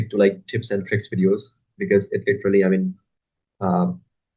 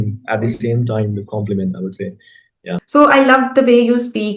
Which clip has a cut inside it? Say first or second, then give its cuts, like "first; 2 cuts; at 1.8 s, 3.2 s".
second; 1 cut; at 2.8 s